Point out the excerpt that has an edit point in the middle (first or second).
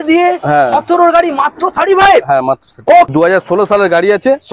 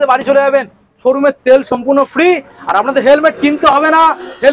first